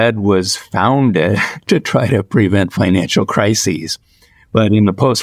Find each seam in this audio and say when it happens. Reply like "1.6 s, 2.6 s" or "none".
none